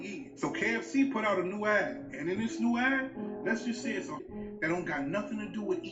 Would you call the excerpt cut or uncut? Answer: cut